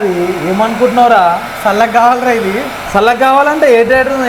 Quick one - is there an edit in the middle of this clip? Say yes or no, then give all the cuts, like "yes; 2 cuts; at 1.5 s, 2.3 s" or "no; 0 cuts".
no; 0 cuts